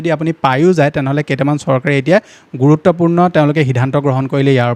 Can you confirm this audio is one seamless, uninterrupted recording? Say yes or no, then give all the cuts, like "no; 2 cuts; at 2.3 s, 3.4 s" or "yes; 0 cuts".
yes; 0 cuts